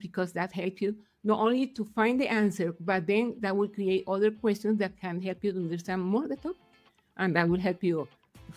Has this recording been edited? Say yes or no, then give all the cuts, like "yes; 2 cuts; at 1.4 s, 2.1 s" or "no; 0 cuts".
no; 0 cuts